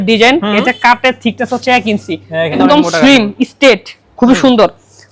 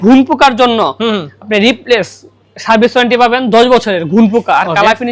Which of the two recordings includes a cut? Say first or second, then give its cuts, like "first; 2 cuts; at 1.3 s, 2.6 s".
first; 1 cut; at 2.6 s